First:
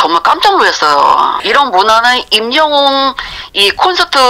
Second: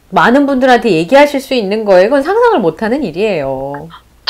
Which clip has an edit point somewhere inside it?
first; 1 cut; at 1.4 s

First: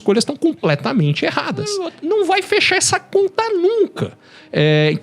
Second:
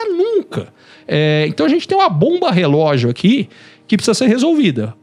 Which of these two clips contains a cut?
first; 1 cut; at 1.9 s

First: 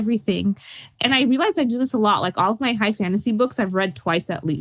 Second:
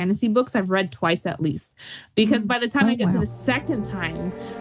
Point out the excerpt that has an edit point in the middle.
first; 1 cut; at 1.0 s

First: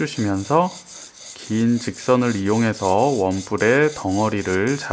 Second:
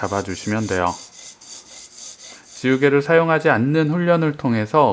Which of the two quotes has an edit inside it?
second; 1 cut; at 2.4 s

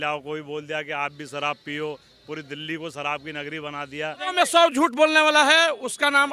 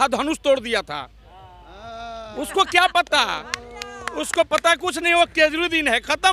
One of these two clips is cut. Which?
first; 1 cut; at 4.2 s

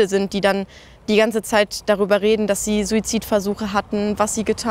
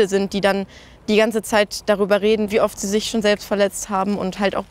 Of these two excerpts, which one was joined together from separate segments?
second; 1 cut; at 2.5 s

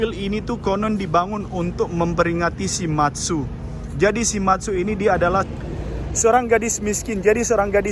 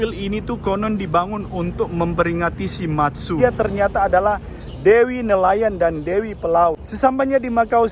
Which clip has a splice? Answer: second; 2 cuts; at 3.4 s, 6.9 s

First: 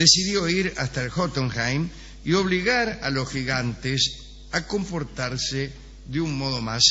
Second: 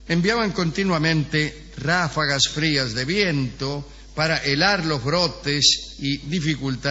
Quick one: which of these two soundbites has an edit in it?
second; 1 cut; at 3.2 s

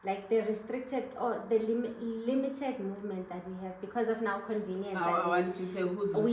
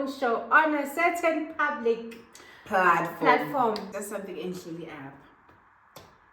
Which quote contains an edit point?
second; 1 cut; at 3.9 s

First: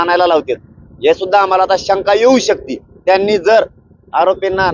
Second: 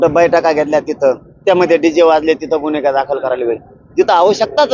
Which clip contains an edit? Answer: second; 1 cut; at 1.4 s

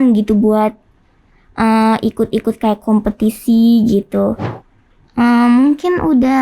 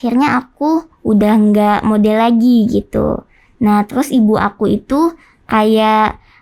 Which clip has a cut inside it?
first; 1 cut; at 4.5 s

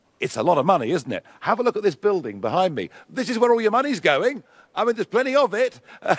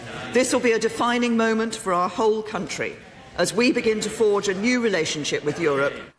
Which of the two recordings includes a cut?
second; 1 cut; at 4.4 s

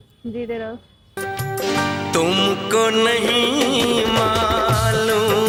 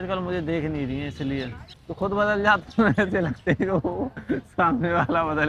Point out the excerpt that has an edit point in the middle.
second; 1 cut; at 1.7 s

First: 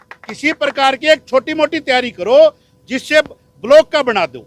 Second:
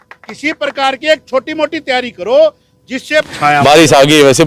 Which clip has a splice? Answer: second; 1 cut; at 3.3 s

